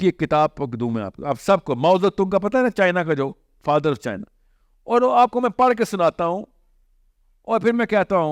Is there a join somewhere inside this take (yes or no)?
no